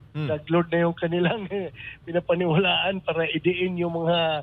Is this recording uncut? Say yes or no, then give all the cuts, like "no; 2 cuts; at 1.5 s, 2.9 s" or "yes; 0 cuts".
yes; 0 cuts